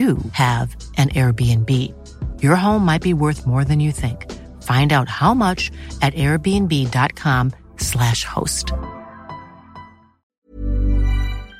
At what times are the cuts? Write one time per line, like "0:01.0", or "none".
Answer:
0:10.2